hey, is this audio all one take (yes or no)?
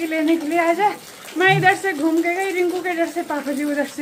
yes